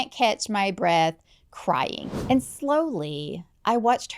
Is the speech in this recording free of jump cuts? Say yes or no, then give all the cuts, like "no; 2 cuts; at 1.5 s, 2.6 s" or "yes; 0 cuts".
no; 1 cut; at 2.1 s